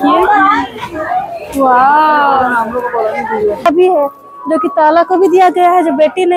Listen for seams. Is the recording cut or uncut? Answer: cut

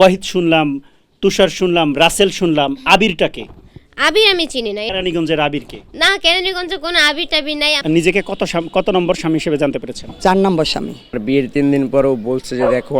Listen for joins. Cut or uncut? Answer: cut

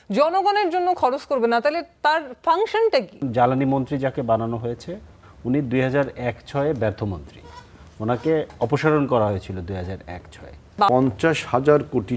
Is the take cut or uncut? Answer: cut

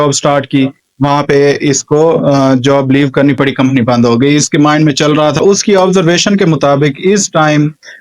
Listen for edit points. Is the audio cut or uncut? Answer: cut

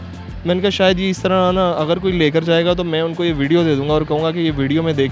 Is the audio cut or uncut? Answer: uncut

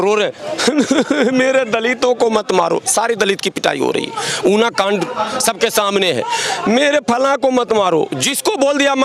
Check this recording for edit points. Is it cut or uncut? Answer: uncut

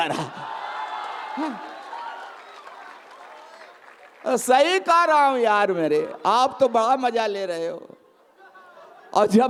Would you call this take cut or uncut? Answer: uncut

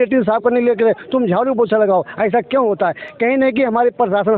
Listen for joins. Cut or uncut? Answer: uncut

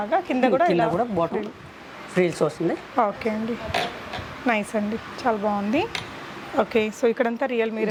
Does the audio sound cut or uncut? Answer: uncut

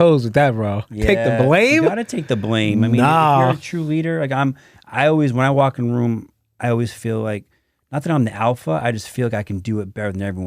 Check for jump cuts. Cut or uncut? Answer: uncut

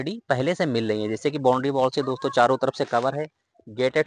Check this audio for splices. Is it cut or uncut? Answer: uncut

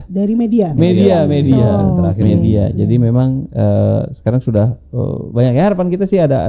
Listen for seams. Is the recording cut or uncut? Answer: uncut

